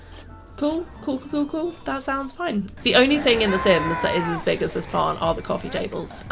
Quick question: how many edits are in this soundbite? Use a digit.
1